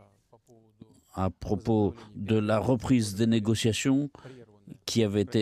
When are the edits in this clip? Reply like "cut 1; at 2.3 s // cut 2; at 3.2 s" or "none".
cut 1; at 2.6 s